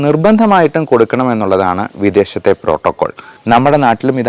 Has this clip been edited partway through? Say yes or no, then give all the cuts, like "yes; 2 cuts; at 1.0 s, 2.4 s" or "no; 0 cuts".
yes; 1 cut; at 3.3 s